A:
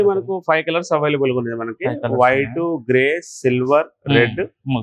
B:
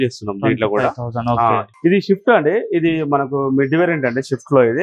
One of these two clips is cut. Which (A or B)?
B